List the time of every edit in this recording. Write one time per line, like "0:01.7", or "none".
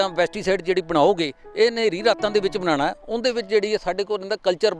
none